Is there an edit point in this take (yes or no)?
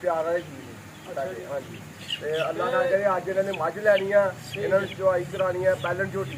no